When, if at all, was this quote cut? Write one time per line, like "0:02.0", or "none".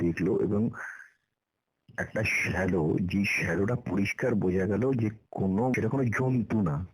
0:05.7